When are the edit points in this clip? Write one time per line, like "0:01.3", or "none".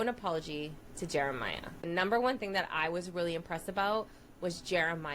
0:01.9